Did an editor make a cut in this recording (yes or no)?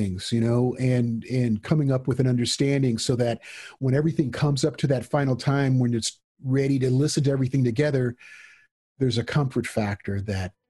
no